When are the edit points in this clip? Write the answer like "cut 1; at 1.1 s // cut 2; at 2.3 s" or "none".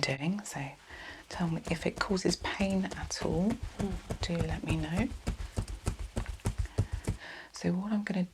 cut 1; at 7.2 s